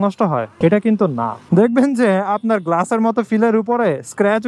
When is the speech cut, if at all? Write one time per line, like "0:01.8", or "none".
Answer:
0:01.4